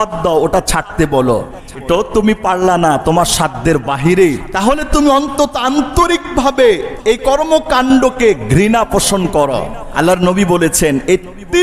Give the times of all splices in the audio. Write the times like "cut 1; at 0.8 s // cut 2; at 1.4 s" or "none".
cut 1; at 1.7 s // cut 2; at 4.5 s // cut 3; at 6.9 s // cut 4; at 9.8 s